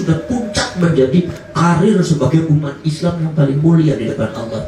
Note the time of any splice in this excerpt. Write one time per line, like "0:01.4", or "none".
none

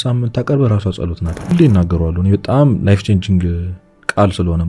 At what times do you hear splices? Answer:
0:01.5

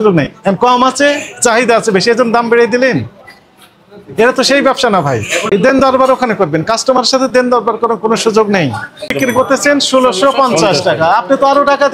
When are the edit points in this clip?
0:05.5
0:09.1

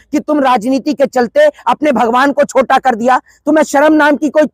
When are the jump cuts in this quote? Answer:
none

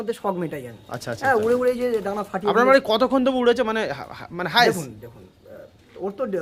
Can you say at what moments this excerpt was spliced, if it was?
none

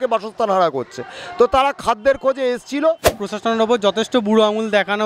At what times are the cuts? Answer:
0:03.1

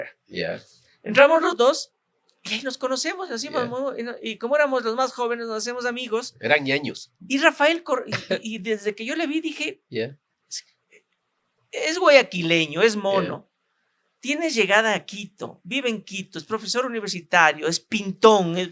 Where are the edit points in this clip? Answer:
none

